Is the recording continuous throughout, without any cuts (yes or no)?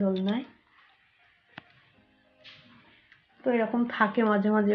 yes